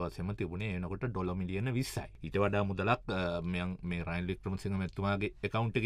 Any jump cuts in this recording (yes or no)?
yes